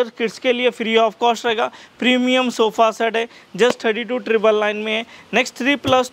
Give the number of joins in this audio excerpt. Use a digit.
0